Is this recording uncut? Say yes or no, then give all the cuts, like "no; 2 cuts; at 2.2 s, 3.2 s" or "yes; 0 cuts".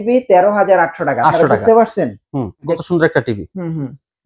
no; 1 cut; at 2.8 s